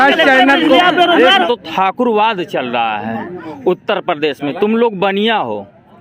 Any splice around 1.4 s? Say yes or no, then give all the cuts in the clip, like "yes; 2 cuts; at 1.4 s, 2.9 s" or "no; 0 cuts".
yes; 1 cut; at 1.4 s